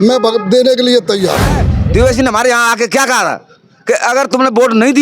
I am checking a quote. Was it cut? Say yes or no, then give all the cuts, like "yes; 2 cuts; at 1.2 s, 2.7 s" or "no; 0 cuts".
yes; 1 cut; at 1.7 s